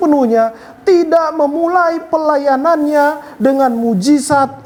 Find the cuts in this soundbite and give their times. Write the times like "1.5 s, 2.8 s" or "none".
none